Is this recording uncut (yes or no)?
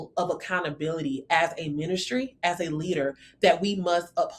yes